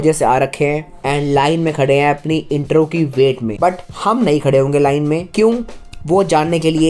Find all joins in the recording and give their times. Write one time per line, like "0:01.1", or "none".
0:00.9
0:03.5
0:05.3